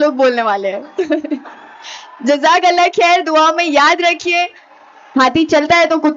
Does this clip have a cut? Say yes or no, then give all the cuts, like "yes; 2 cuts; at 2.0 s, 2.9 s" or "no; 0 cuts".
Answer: yes; 1 cut; at 4.6 s